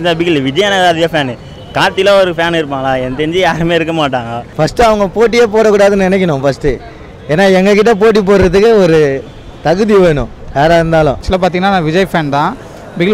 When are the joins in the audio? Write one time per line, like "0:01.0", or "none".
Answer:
0:04.4
0:11.2